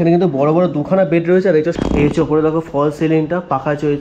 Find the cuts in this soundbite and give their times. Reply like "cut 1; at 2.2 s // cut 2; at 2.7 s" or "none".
cut 1; at 1.8 s